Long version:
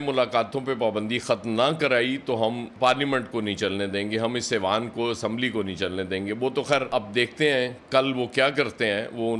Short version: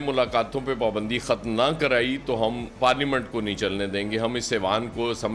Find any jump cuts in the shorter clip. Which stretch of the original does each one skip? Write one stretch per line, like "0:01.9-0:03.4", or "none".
none